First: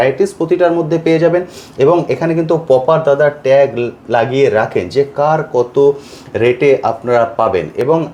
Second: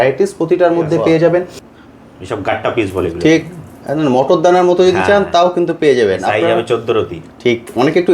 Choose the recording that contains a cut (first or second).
second